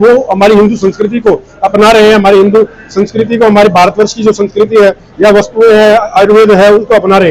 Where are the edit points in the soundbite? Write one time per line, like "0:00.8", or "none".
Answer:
none